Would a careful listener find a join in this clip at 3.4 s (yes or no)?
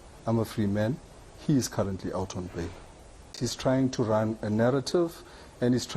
yes